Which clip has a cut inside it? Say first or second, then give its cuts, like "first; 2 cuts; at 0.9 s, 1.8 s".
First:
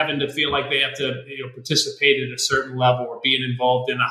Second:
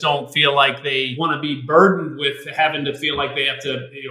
second; 1 cut; at 1.1 s